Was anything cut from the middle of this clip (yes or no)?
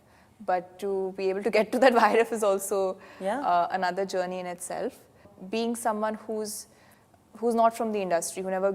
yes